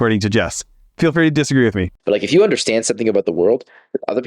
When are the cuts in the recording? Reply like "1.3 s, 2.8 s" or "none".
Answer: 1.9 s